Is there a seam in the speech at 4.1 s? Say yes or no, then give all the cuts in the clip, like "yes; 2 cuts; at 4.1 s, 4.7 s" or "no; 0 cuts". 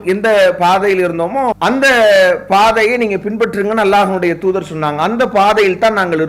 no; 1 cut; at 1.6 s